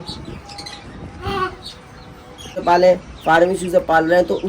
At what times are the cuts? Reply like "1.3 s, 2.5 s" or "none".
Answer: 2.6 s